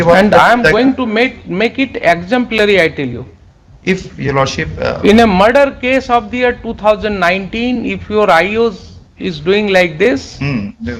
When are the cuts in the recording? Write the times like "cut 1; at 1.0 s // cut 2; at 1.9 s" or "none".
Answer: none